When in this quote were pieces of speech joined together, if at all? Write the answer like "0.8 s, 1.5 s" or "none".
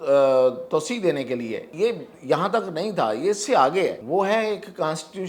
1.7 s, 4.0 s